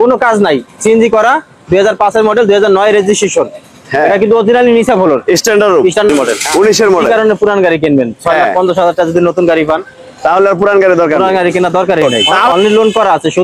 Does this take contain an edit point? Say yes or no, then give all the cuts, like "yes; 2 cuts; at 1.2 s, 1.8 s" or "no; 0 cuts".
yes; 2 cuts; at 6.1 s, 12.5 s